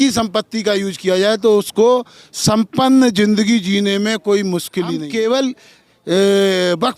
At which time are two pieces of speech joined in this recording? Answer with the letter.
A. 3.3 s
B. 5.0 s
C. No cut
B